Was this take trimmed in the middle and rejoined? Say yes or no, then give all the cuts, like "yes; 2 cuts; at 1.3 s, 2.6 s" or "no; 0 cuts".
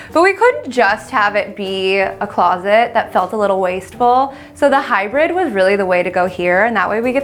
no; 0 cuts